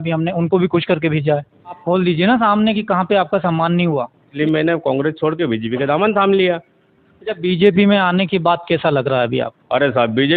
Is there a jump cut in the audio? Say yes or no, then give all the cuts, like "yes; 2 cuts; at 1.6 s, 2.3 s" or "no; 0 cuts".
yes; 2 cuts; at 1.7 s, 4.3 s